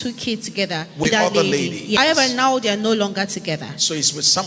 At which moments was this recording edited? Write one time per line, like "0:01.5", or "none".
0:01.0
0:02.0